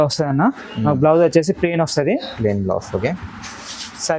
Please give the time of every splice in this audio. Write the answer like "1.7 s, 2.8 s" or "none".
none